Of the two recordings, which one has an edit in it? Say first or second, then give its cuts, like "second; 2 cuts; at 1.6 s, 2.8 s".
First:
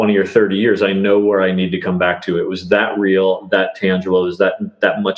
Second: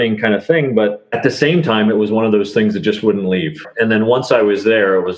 second; 2 cuts; at 1.1 s, 3.7 s